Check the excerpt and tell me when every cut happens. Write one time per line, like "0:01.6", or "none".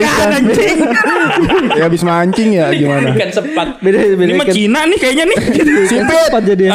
none